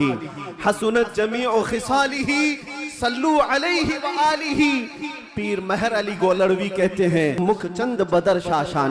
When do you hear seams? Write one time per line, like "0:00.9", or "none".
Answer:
0:07.4

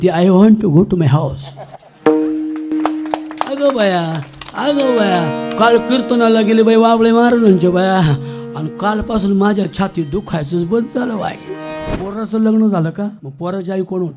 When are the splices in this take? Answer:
0:11.9
0:13.3

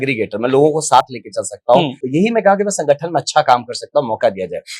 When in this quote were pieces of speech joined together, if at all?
0:02.0

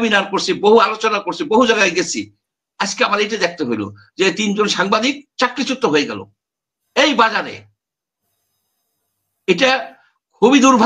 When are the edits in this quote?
none

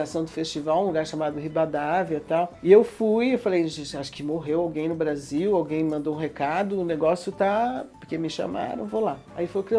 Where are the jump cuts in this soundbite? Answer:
none

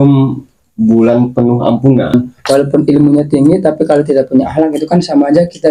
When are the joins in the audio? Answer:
0:02.1

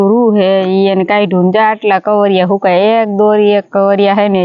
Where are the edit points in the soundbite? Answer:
none

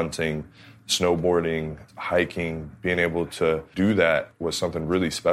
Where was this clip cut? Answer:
0:01.8
0:03.7
0:04.3

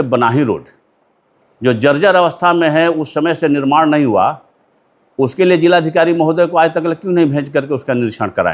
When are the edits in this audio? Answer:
none

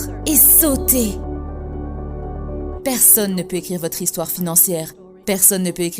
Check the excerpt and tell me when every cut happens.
0:02.7

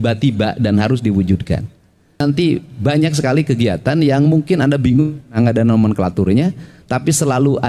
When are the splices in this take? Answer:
0:02.2

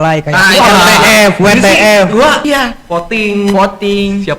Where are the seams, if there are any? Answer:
0:02.4

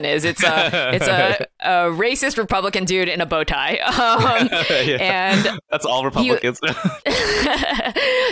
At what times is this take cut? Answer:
0:05.8
0:07.0

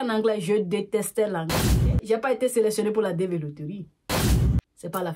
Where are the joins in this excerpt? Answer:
0:01.6

